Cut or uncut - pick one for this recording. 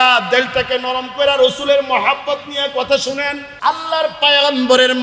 cut